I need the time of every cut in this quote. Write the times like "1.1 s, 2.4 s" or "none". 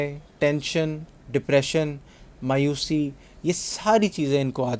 none